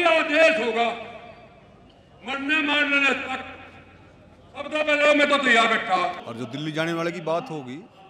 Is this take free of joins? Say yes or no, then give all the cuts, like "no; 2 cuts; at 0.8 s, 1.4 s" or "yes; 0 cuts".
no; 1 cut; at 6.2 s